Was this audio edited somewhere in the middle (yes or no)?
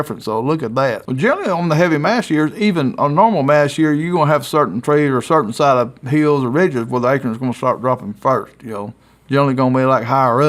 yes